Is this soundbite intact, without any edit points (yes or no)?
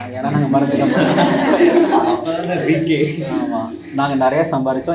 yes